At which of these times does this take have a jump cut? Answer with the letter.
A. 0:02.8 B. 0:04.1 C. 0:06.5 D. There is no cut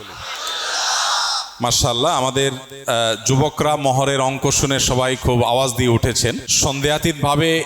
C